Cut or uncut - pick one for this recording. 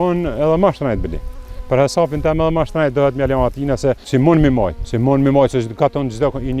cut